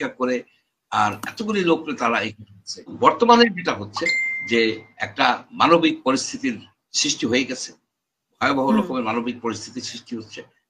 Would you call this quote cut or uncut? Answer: cut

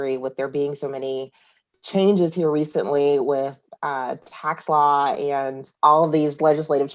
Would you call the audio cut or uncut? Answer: cut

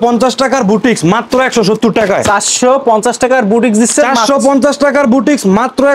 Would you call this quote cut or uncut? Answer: uncut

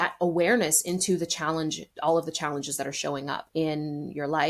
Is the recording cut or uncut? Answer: cut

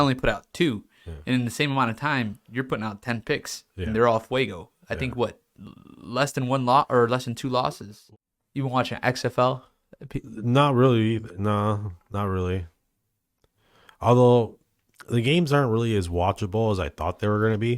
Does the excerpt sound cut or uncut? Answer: cut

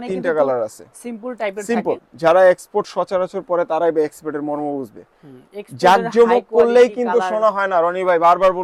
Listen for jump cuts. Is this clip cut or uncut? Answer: uncut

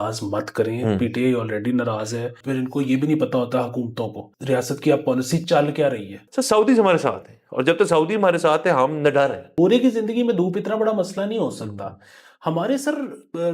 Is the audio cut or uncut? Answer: cut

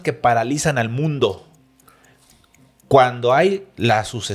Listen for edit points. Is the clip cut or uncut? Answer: uncut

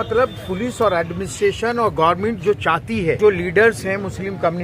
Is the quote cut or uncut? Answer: cut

